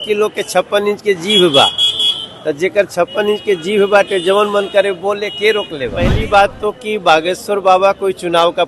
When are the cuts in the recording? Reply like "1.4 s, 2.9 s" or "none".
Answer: 6.0 s